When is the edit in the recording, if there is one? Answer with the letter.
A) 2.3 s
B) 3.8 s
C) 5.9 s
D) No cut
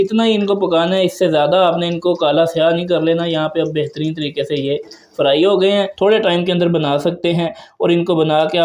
C